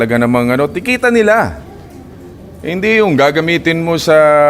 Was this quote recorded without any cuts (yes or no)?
yes